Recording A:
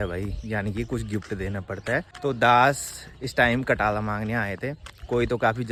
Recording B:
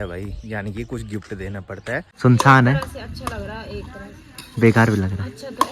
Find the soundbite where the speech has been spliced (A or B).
B